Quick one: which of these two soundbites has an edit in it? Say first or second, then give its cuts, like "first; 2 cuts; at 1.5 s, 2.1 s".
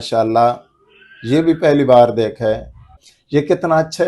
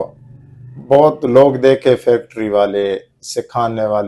first; 1 cut; at 3.1 s